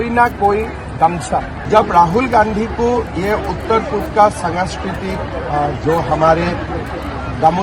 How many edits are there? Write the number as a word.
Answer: one